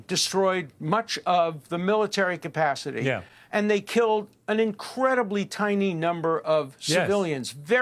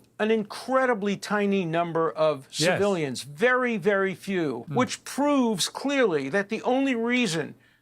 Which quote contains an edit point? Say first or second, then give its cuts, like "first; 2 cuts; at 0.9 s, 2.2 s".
second; 1 cut; at 4.6 s